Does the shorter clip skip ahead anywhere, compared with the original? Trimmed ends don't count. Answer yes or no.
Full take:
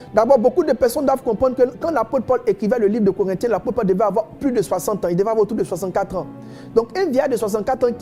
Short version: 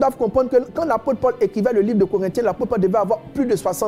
no